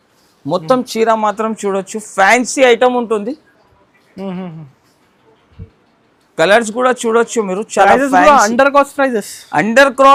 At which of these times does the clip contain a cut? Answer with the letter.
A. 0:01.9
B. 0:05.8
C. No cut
C